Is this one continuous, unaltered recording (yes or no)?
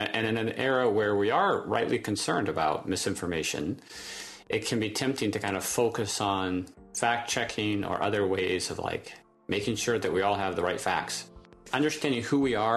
no